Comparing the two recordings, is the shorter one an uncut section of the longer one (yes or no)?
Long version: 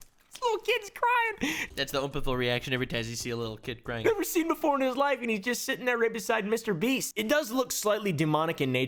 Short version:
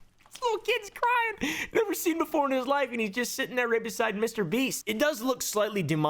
no